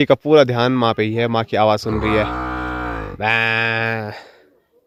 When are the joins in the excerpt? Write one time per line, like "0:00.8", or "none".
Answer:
none